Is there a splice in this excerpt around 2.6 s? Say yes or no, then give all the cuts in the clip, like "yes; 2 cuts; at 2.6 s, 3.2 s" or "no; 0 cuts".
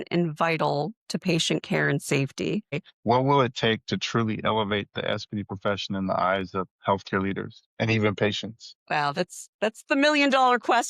yes; 1 cut; at 2.6 s